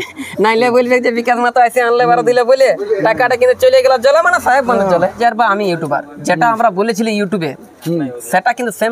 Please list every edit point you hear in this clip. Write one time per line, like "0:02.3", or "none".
0:05.2